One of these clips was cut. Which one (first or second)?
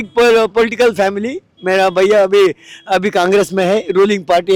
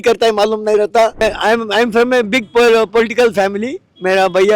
second